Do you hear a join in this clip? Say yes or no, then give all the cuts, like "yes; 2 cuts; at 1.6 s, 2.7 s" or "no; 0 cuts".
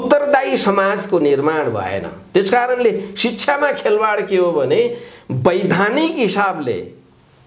no; 0 cuts